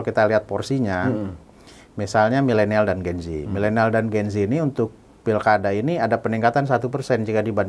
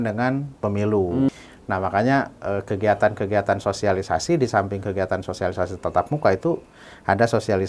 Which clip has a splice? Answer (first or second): second